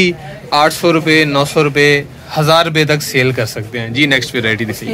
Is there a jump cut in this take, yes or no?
no